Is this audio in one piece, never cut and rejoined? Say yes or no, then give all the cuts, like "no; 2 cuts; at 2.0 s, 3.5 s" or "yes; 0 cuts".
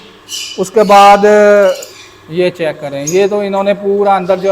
no; 1 cut; at 1.9 s